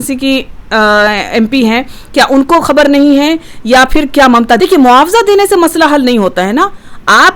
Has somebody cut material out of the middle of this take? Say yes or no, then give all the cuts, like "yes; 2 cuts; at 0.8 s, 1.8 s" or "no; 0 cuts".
yes; 1 cut; at 4.6 s